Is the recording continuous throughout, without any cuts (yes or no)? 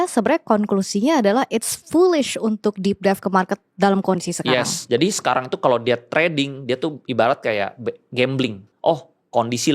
no